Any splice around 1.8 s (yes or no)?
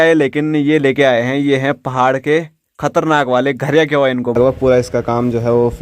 no